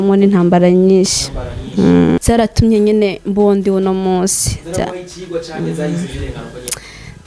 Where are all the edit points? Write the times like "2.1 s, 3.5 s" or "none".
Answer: 2.2 s